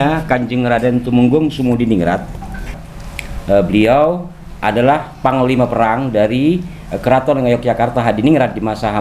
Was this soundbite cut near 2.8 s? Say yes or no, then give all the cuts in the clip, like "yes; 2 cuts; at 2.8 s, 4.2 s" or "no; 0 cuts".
yes; 1 cut; at 2.8 s